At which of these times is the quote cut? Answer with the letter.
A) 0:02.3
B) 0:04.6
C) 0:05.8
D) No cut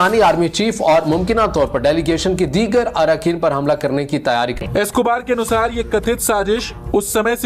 B